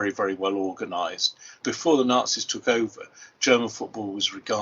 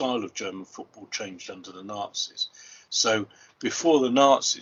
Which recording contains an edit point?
first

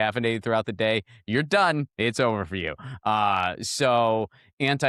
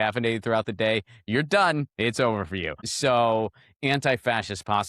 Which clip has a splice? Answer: second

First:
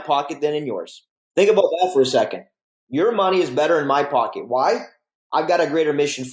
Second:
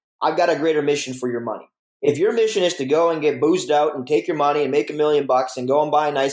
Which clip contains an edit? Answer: first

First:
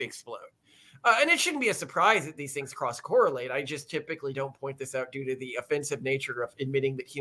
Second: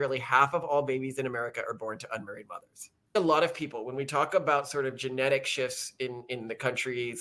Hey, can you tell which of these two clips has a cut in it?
second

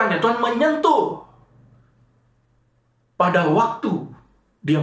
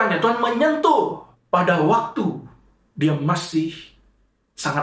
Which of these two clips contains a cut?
second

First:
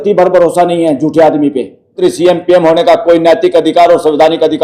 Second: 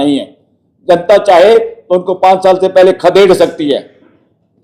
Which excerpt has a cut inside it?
first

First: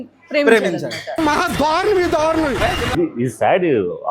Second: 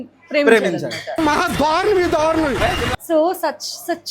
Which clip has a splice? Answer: first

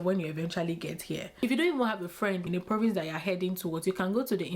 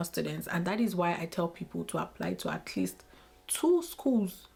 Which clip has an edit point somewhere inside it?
first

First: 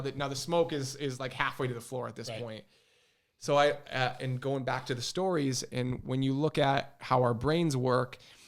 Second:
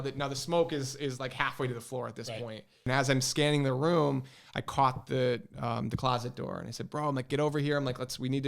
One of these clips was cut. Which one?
second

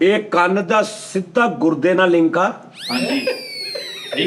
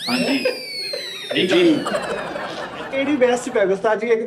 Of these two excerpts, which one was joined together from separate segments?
second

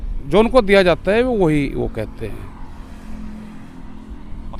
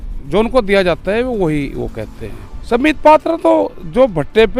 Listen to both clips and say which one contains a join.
second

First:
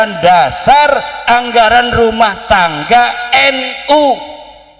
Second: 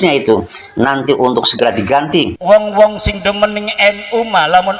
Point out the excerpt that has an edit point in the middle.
second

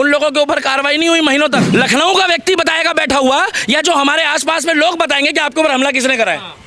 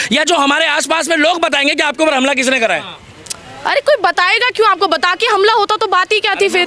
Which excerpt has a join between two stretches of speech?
first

